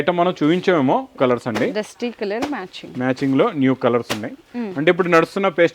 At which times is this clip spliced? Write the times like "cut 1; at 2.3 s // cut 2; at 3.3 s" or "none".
cut 1; at 1.2 s